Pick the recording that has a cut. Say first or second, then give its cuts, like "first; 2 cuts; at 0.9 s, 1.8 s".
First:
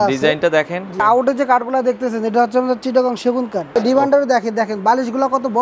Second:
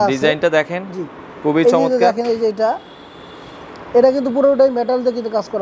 first; 2 cuts; at 1.0 s, 3.7 s